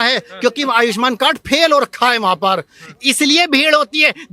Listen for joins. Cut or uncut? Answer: uncut